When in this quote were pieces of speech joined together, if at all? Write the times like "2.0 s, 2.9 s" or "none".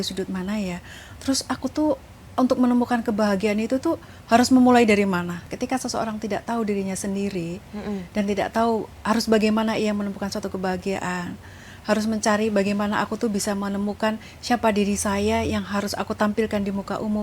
5.4 s